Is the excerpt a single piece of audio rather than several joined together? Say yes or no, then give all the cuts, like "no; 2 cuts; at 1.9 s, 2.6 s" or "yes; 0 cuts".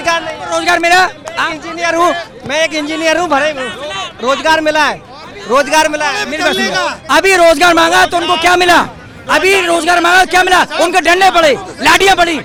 yes; 0 cuts